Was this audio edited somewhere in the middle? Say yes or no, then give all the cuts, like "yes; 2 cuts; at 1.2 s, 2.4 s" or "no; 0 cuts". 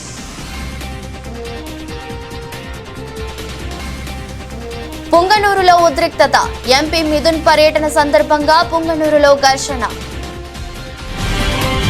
yes; 1 cut; at 2.5 s